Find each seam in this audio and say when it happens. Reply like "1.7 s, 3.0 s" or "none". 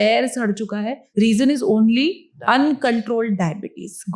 1.0 s, 2.3 s